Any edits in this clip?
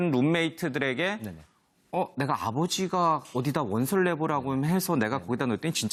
no; 0 cuts

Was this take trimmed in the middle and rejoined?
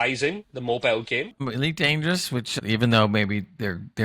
yes; 2 cuts; at 1.4 s, 2.6 s

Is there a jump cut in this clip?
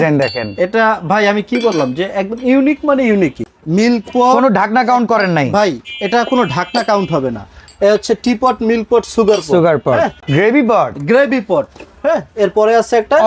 yes; 2 cuts; at 3.5 s, 10.2 s

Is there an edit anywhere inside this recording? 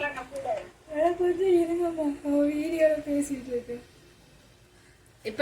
no; 0 cuts

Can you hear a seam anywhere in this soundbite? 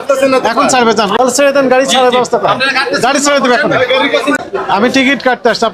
yes; 2 cuts; at 1.1 s, 4.4 s

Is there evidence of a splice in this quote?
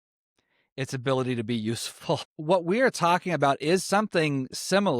yes; 1 cut; at 2.3 s

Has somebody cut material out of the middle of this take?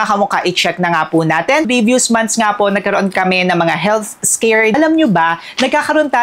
yes; 2 cuts; at 1.7 s, 4.7 s

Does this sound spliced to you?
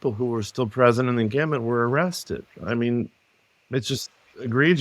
no; 0 cuts

